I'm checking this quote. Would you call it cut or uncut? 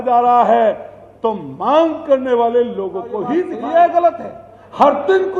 cut